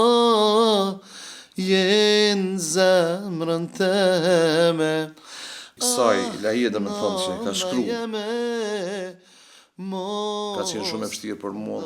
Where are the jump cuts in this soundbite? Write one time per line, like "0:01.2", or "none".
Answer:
0:10.6

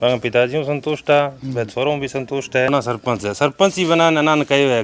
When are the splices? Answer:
0:02.7

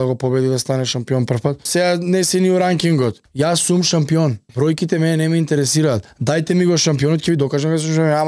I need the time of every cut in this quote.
0:01.7
0:03.2
0:04.4
0:06.1

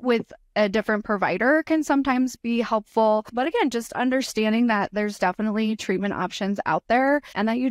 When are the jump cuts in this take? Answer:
none

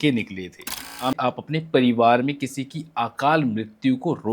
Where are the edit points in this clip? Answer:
0:01.2

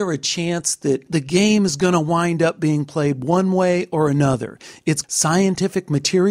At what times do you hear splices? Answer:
0:01.1
0:05.0

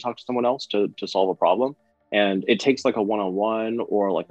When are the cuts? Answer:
none

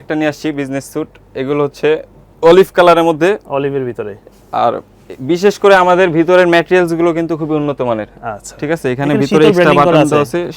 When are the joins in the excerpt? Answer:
none

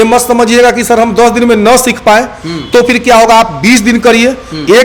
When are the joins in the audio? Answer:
none

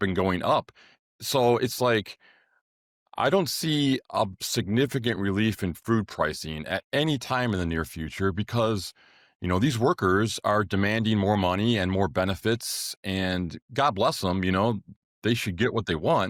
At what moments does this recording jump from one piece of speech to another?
none

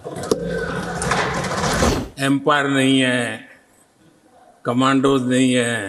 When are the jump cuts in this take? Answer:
0:01.9

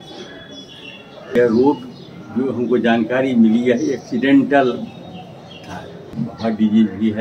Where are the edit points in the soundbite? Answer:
0:01.4
0:06.1

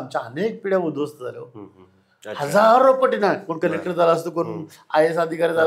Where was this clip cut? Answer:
none

